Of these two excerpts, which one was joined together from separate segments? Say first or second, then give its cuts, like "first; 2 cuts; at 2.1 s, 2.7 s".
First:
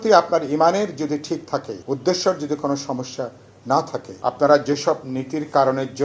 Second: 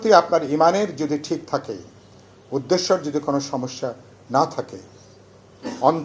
first; 2 cuts; at 1.7 s, 4.1 s